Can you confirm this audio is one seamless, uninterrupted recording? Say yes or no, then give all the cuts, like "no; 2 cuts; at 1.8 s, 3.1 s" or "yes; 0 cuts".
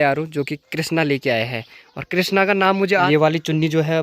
no; 1 cut; at 3.1 s